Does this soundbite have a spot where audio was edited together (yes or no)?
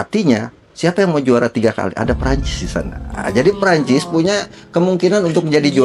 no